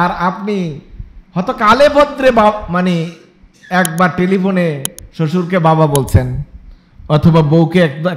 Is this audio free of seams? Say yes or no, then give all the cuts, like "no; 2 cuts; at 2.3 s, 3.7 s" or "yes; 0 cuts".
yes; 0 cuts